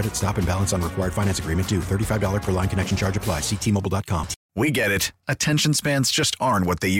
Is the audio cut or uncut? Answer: cut